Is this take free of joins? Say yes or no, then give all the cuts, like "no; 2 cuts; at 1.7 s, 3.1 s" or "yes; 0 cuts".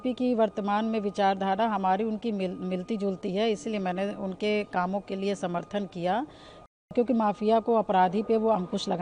no; 1 cut; at 6.8 s